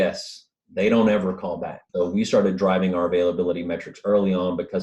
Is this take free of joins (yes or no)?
no